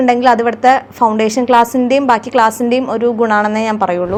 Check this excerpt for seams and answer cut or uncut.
uncut